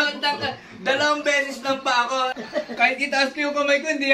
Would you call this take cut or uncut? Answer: cut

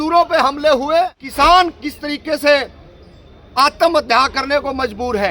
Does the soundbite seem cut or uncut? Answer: cut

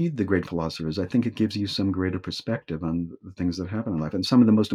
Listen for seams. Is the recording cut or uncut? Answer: uncut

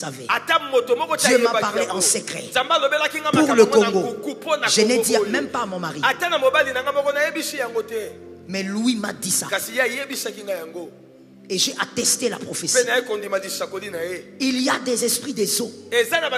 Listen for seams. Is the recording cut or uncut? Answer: uncut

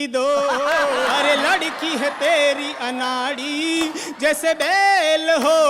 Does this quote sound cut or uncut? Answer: cut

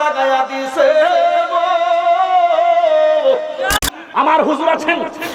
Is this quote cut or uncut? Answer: cut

